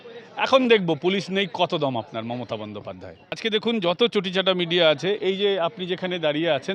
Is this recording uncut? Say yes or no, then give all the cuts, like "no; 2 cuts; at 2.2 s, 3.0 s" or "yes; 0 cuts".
no; 1 cut; at 3.4 s